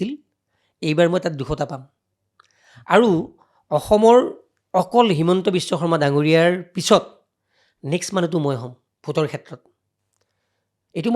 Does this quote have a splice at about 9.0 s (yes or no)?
no